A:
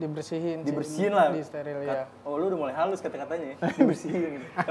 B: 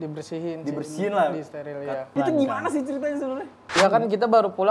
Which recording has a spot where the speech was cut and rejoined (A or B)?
B